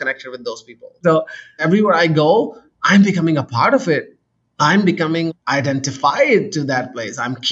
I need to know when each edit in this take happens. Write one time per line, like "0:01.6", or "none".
0:01.3